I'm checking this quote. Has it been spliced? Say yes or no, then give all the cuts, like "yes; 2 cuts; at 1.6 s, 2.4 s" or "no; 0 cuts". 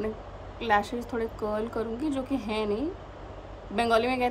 no; 0 cuts